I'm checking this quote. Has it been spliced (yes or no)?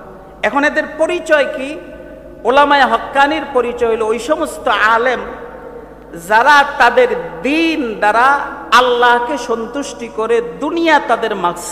no